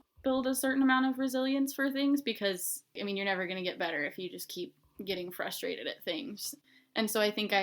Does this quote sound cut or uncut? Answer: cut